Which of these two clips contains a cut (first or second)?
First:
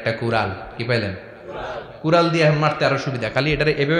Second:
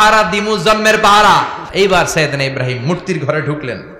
second